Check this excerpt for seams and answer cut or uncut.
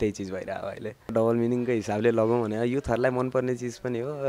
cut